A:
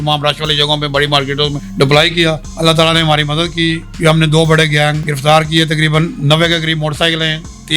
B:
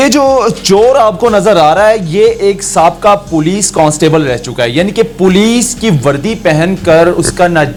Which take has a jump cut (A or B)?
A